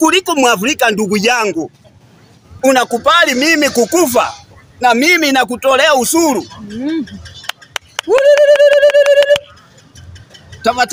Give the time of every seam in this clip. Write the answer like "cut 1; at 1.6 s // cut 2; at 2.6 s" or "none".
none